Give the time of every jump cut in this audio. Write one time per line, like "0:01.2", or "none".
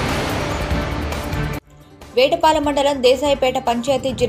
0:01.7

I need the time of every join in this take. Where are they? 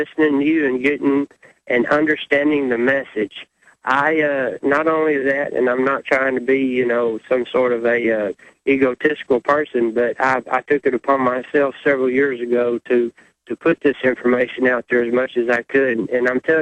0:13.1

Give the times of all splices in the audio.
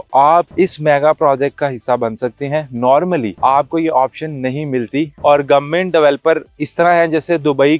0:05.2

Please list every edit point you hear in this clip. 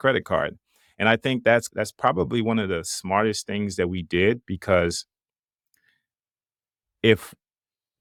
none

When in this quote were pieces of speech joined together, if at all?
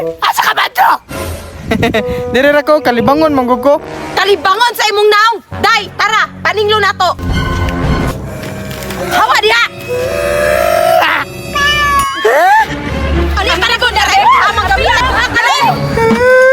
0:15.0

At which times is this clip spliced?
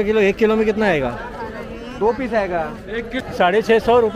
0:03.1

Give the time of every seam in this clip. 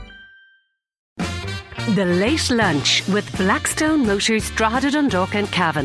0:01.1

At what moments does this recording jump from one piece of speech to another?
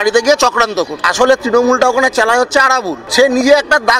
0:01.0
0:03.0

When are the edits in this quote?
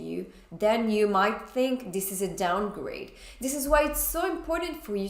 none

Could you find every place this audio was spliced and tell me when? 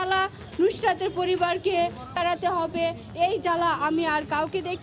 0:02.2

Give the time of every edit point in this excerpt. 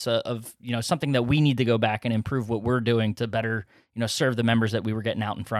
none

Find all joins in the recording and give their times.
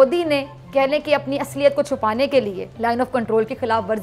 0:02.6

